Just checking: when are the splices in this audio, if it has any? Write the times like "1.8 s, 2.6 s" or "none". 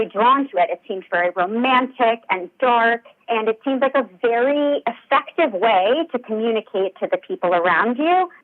none